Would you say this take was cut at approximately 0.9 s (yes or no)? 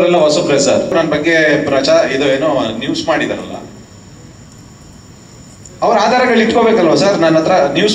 yes